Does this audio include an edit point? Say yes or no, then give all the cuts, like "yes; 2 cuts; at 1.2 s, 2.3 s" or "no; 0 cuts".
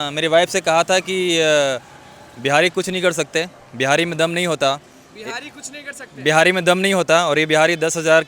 no; 0 cuts